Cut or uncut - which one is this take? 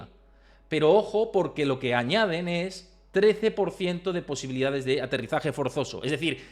uncut